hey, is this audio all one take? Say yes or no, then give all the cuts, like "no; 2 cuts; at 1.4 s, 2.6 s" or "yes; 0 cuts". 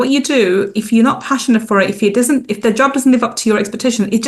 yes; 0 cuts